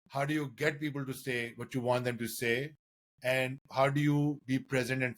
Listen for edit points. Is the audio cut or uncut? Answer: uncut